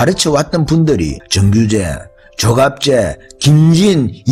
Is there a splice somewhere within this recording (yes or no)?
no